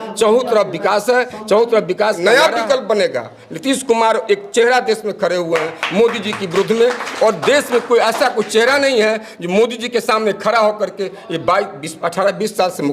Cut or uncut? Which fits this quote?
cut